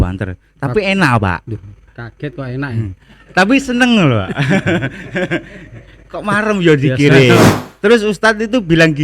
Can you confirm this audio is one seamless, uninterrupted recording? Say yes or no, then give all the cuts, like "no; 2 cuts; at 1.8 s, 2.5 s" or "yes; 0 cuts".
no; 1 cut; at 7.5 s